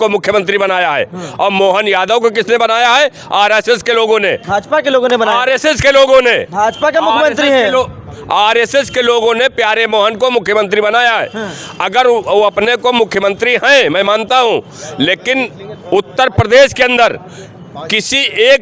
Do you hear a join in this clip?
no; 0 cuts

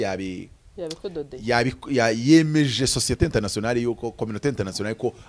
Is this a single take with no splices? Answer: yes; 0 cuts

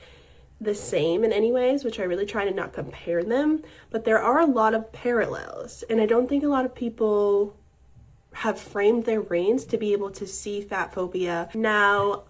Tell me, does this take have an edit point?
yes; 3 cuts; at 1.9 s, 3.8 s, 6.8 s

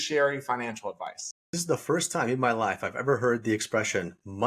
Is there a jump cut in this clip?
yes; 1 cut; at 1.5 s

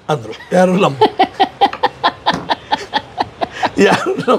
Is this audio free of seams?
yes; 0 cuts

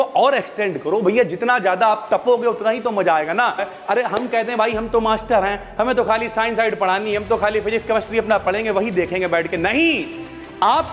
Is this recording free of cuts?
no; 1 cut; at 3.7 s

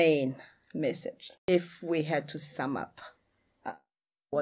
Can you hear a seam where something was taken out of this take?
yes; 1 cut; at 1.3 s

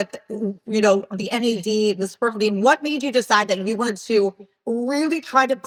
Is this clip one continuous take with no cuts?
yes; 0 cuts

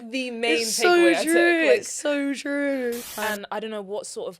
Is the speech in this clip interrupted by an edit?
yes; 1 cut; at 3.0 s

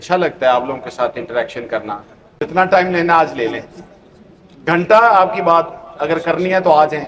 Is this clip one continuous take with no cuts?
no; 1 cut; at 2.4 s

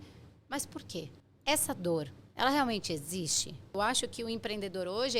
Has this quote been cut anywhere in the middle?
yes; 2 cuts; at 1.2 s, 3.7 s

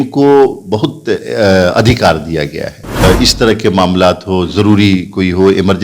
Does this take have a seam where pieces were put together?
yes; 1 cut; at 3.0 s

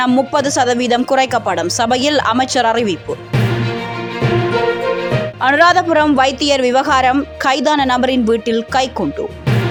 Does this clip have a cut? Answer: no; 0 cuts

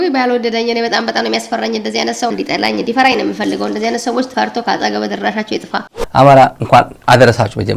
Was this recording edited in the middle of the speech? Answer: yes; 2 cuts; at 2.3 s, 6.0 s

